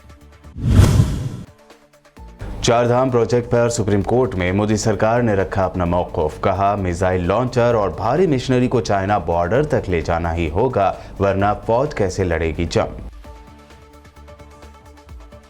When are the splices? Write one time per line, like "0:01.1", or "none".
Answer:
0:01.2

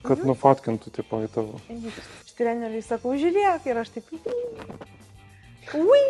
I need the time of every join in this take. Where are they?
0:02.3

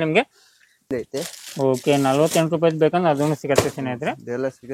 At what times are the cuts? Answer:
0:00.9

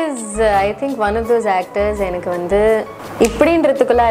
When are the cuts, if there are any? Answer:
0:03.0

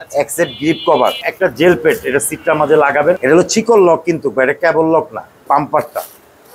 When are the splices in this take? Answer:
0:01.3
0:03.2
0:05.5

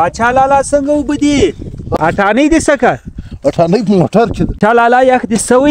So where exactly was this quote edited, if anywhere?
0:01.9
0:04.5

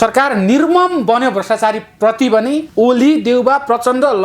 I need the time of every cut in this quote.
0:02.7

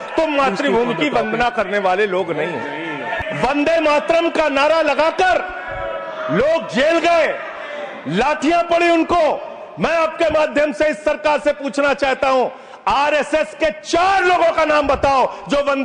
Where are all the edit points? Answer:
0:03.1

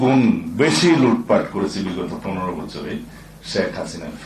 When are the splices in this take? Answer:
none

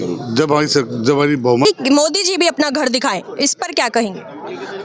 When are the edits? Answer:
0:01.6

